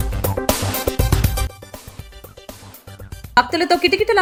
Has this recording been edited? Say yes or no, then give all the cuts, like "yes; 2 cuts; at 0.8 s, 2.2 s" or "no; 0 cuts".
no; 0 cuts